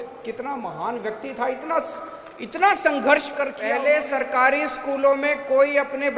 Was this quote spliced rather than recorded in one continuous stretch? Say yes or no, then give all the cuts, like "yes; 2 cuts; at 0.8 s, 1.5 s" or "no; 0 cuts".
yes; 1 cut; at 3.6 s